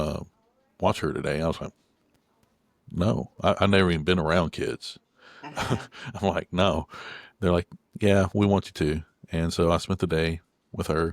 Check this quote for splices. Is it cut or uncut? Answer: uncut